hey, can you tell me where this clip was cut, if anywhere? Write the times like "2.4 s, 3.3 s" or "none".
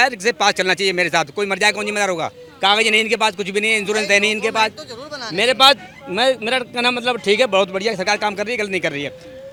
none